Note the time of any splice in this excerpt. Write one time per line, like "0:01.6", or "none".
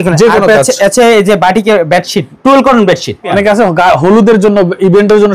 0:02.3
0:03.3